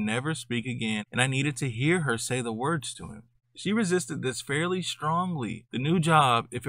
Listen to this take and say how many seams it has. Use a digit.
1